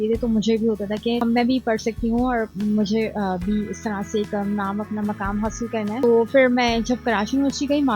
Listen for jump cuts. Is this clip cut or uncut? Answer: uncut